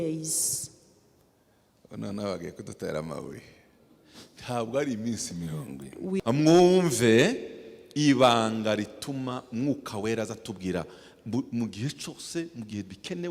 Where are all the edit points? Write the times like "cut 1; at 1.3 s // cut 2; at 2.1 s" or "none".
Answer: cut 1; at 6.2 s